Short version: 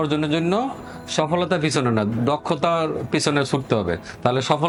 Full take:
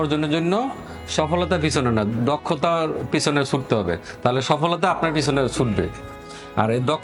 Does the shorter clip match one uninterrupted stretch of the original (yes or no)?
yes